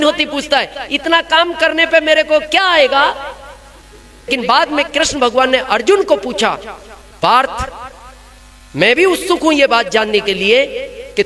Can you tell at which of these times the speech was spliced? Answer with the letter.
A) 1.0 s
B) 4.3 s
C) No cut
B